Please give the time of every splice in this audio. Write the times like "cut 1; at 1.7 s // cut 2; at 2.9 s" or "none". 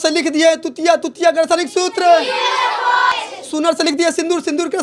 cut 1; at 3.1 s